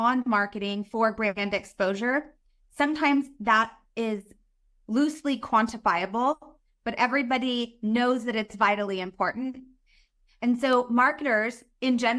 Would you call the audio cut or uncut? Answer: cut